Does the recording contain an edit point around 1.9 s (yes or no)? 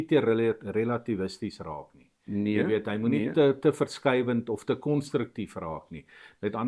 no